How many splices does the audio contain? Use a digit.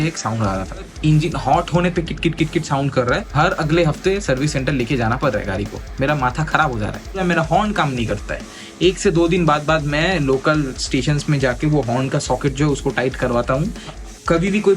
4